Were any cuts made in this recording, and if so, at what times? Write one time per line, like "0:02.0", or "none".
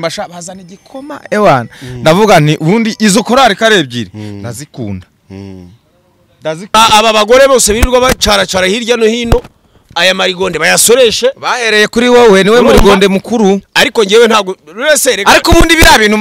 0:06.6